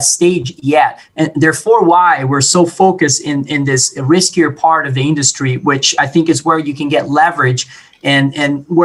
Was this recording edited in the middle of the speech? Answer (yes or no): no